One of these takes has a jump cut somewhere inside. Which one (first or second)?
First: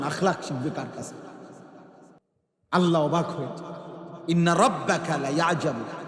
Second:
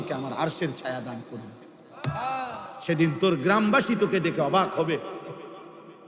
first